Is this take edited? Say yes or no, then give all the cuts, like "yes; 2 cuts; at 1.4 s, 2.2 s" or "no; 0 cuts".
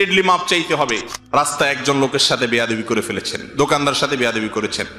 yes; 1 cut; at 1.1 s